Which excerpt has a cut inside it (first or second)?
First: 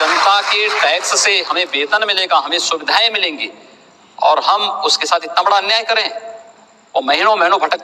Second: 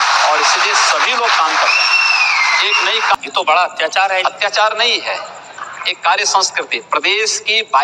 second